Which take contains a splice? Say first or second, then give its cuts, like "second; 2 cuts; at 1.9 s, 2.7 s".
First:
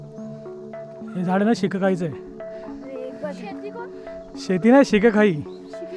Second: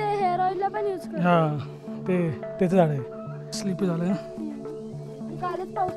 second; 1 cut; at 3.4 s